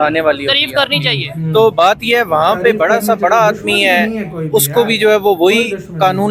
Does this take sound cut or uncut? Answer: uncut